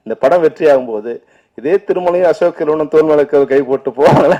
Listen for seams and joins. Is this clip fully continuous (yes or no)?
yes